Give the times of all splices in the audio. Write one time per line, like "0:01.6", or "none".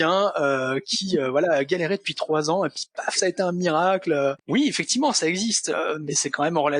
0:04.4